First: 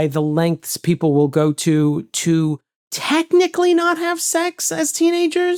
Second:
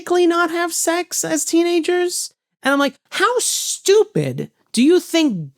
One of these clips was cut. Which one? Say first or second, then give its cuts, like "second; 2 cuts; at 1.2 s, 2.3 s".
second; 1 cut; at 3.0 s